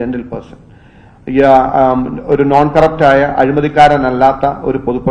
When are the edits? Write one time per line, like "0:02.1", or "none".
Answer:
none

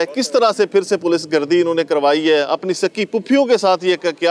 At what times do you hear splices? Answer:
none

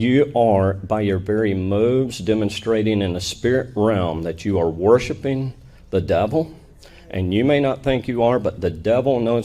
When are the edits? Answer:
none

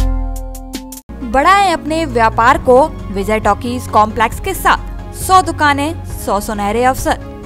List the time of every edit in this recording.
none

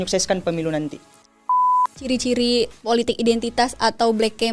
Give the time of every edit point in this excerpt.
0:01.7

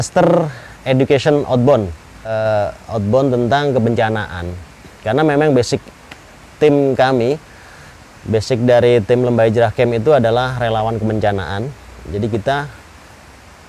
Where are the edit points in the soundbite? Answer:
0:02.3

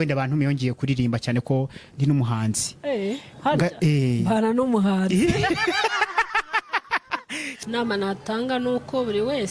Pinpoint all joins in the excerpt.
0:07.4

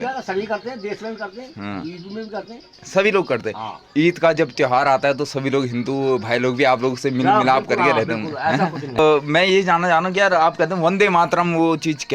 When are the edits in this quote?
0:08.9

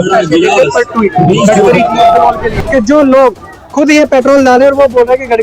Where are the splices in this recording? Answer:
0:02.5

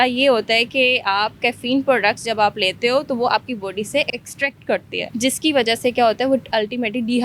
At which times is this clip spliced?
0:04.2
0:05.0

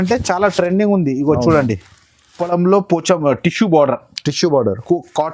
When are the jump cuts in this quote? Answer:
0:02.4

